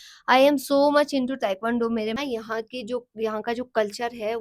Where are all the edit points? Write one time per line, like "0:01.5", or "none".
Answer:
0:02.1